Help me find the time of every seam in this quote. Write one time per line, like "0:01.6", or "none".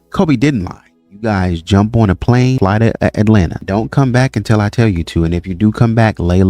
0:01.2
0:02.6
0:03.6